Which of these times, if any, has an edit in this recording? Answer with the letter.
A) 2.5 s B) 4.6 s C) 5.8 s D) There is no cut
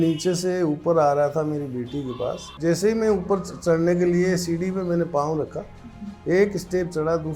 A